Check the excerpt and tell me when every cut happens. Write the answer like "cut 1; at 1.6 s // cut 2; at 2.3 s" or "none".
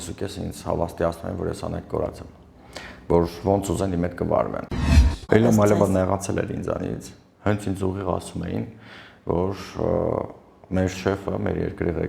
cut 1; at 5.0 s